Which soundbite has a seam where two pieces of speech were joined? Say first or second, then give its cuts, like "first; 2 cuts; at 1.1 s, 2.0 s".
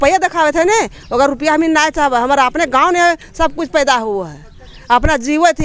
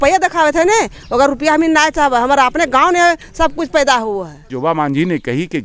second; 1 cut; at 4.4 s